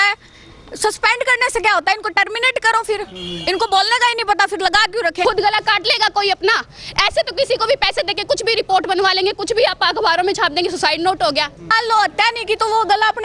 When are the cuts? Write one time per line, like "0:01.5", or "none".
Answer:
0:05.2
0:11.7